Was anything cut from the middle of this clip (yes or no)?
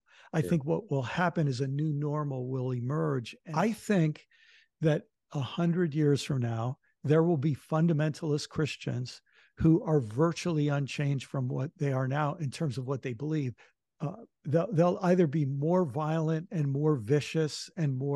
yes